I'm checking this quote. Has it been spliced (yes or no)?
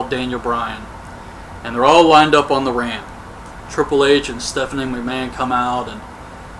no